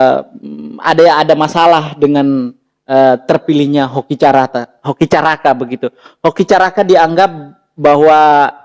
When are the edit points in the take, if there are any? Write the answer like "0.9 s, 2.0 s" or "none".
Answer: none

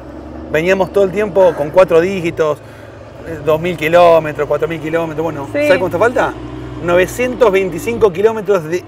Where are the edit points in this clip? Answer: none

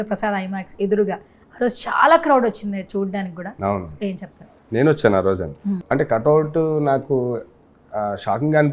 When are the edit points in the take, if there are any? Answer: 5.8 s

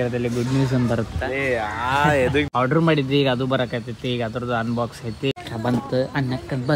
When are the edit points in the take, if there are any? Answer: 2.5 s, 5.3 s

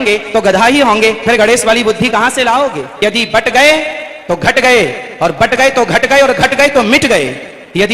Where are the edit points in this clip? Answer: 2.9 s

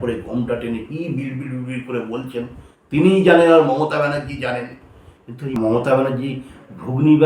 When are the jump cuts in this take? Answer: 5.6 s

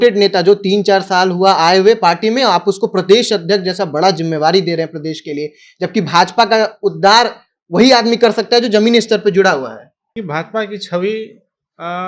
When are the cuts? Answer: 10.1 s

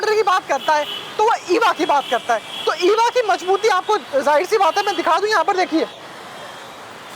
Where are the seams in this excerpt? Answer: none

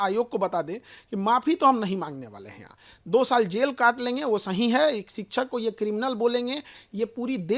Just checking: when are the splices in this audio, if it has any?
none

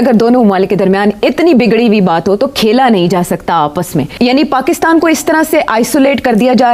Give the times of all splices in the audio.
4.1 s

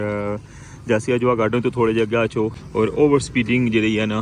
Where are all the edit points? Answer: 2.6 s

